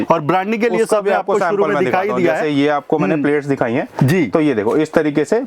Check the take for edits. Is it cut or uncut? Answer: uncut